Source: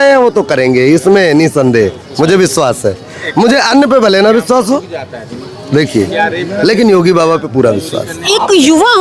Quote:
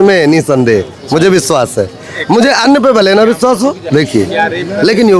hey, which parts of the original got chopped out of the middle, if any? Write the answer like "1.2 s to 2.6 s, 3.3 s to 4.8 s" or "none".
4.9 s to 5.6 s